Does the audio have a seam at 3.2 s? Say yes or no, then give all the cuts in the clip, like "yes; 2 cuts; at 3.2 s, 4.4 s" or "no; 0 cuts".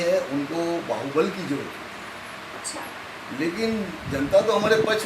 no; 0 cuts